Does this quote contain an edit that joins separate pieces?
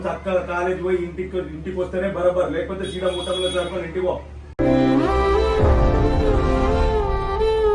no; 0 cuts

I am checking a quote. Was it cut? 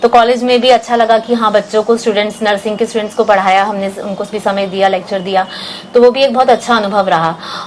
no; 0 cuts

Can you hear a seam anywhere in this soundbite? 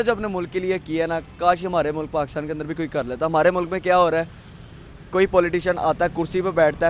no; 0 cuts

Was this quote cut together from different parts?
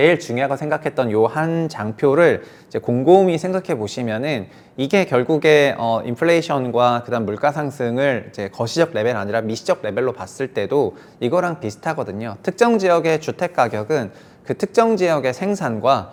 no; 0 cuts

